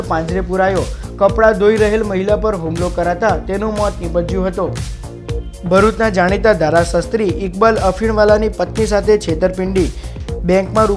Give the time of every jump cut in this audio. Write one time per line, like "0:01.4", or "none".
none